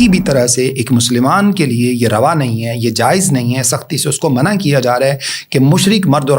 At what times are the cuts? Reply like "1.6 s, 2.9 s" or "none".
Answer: none